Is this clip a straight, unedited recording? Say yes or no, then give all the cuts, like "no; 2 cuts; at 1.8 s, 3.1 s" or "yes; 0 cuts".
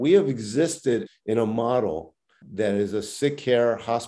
yes; 0 cuts